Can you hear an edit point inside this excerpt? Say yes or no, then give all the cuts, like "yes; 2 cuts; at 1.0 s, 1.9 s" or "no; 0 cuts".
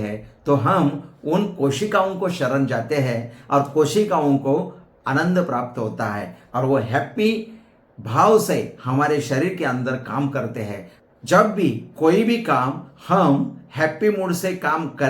yes; 1 cut; at 11.0 s